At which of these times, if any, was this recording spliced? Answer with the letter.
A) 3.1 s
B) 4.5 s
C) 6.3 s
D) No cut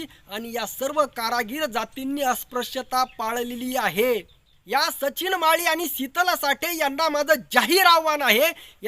B